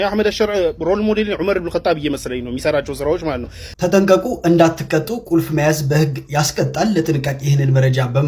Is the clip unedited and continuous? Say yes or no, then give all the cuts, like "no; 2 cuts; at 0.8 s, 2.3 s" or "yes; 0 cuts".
no; 1 cut; at 3.7 s